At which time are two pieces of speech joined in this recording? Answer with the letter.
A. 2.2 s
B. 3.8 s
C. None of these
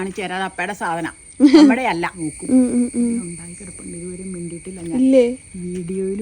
A